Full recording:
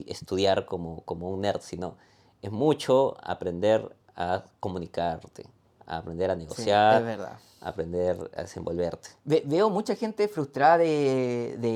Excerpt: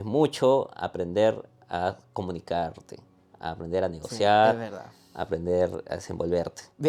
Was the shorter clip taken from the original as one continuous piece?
yes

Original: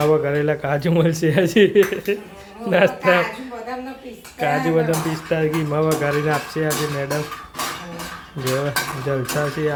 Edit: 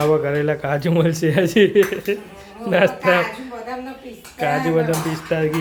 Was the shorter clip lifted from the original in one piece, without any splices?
yes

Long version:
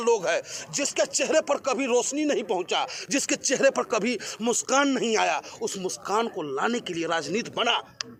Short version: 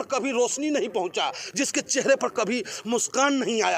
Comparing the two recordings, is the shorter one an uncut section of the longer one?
yes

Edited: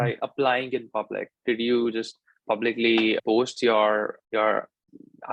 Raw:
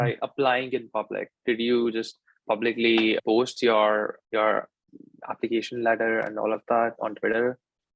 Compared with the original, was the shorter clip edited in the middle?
no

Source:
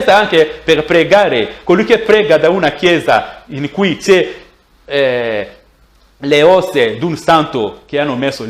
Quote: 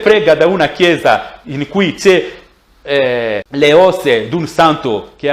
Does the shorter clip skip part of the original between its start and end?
yes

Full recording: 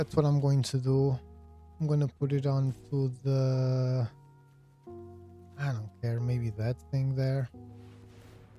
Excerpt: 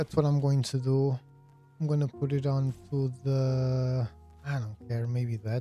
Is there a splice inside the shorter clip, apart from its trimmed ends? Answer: yes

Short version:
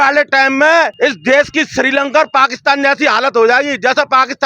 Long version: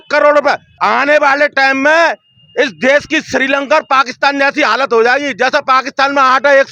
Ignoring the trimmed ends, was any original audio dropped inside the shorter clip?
yes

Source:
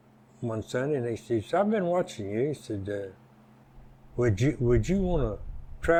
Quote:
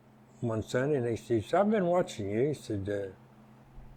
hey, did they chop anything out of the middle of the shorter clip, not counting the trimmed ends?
no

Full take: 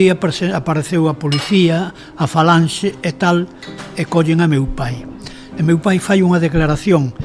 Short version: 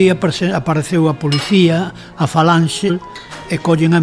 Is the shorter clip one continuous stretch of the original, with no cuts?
no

